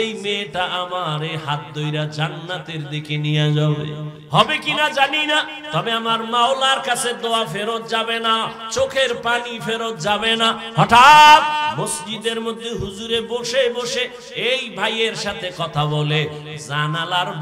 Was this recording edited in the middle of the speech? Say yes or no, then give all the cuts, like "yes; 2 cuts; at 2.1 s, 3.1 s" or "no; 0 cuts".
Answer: yes; 2 cuts; at 4.1 s, 11.7 s